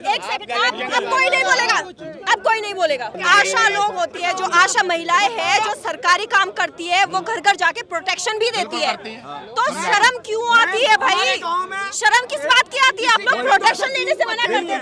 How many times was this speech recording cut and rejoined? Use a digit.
1